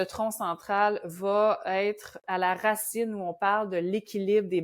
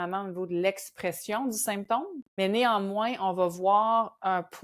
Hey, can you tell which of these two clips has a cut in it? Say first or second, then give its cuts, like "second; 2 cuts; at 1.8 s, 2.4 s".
second; 1 cut; at 2.2 s